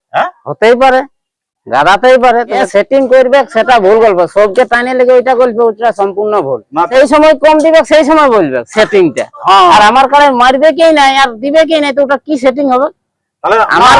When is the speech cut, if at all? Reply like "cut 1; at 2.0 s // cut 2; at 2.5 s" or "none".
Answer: cut 1; at 2.6 s // cut 2; at 6.9 s